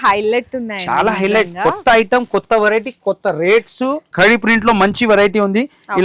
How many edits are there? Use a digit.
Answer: 1